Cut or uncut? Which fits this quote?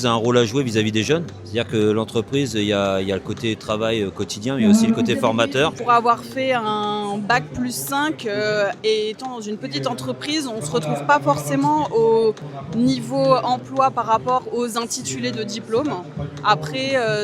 cut